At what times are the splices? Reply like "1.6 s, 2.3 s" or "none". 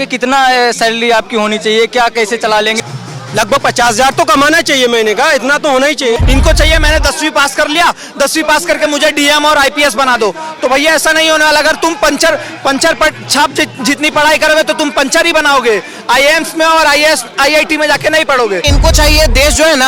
2.8 s, 6.2 s, 18.6 s